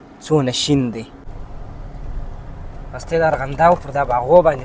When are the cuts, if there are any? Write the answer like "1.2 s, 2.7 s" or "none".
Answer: 1.3 s